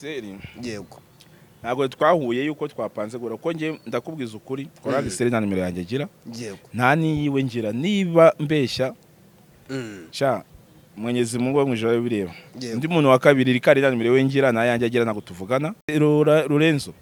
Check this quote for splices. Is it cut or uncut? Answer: uncut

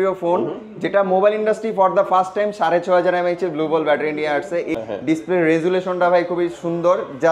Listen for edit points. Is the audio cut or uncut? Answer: cut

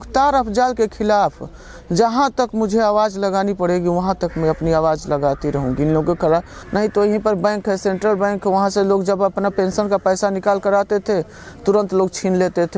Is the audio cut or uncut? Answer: cut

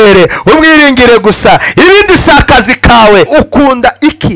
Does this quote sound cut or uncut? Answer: cut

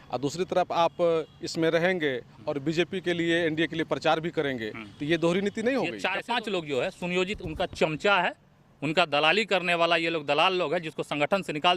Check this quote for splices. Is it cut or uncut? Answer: cut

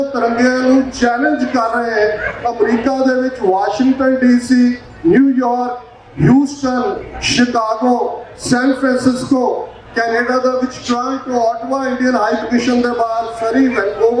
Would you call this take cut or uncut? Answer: uncut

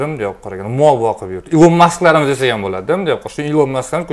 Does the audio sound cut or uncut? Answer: uncut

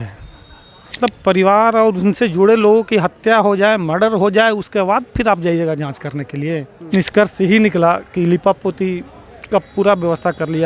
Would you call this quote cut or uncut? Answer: cut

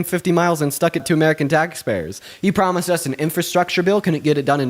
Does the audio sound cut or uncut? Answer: cut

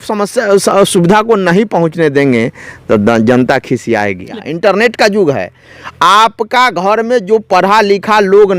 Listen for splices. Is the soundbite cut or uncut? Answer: cut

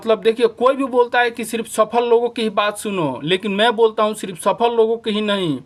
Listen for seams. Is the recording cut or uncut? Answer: uncut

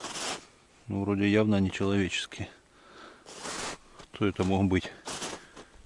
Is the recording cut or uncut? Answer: uncut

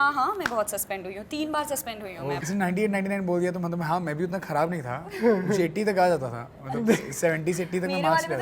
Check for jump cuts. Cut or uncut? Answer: cut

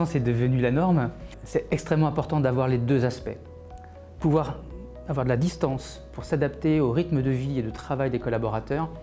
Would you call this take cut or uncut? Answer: cut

